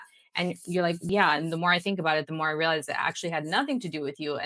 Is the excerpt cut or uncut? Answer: cut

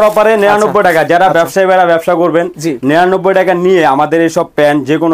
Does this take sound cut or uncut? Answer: uncut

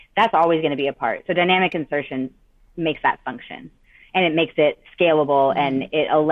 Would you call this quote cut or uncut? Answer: uncut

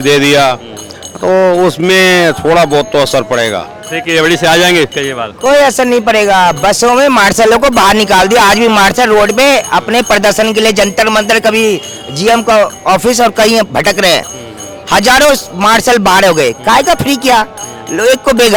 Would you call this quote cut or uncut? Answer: uncut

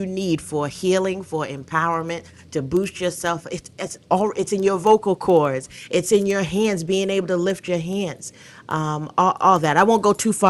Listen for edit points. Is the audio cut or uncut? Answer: uncut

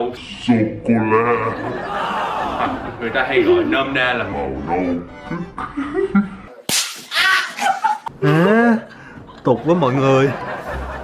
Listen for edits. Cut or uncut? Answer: cut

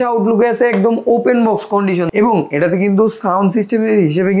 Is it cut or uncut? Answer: cut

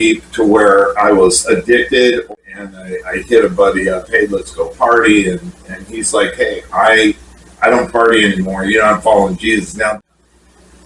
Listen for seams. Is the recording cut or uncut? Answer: cut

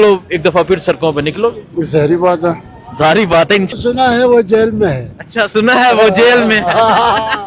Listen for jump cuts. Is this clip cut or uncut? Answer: cut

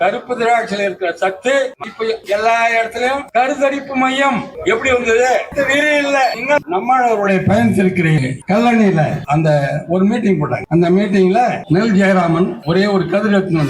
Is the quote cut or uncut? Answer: cut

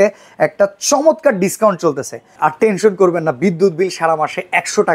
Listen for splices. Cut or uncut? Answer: cut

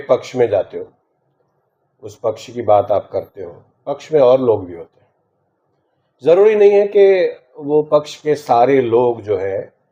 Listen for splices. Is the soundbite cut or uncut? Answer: uncut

